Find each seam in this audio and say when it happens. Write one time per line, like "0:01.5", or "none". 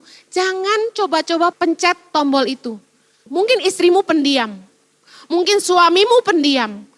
0:01.5
0:03.2